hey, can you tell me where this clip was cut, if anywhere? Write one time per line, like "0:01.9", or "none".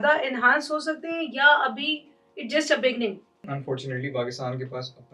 0:03.5